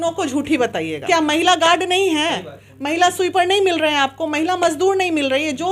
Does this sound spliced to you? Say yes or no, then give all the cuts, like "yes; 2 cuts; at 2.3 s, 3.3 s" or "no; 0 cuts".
yes; 1 cut; at 1.0 s